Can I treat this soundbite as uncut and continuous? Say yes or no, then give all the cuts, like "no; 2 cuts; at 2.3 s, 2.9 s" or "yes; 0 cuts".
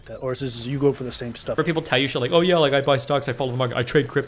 no; 1 cut; at 1.6 s